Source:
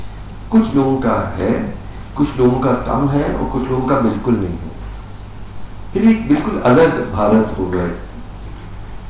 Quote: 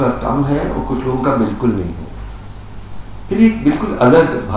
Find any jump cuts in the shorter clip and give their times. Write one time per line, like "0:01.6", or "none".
none